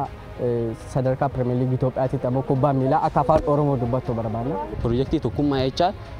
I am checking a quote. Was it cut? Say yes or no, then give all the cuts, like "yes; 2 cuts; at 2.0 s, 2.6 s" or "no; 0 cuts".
yes; 1 cut; at 4.7 s